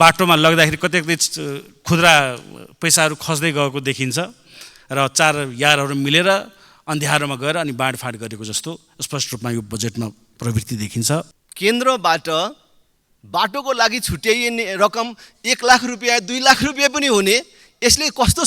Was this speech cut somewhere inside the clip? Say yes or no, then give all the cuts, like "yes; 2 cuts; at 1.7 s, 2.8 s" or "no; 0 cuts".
yes; 1 cut; at 11.4 s